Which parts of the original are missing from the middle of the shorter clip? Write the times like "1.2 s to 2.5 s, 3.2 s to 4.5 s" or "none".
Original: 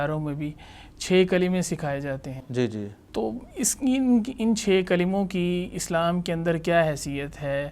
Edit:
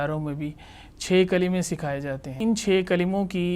2.3 s to 4.3 s